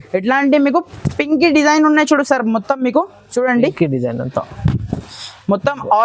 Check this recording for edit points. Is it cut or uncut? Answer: uncut